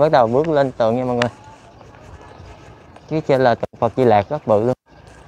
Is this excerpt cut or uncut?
uncut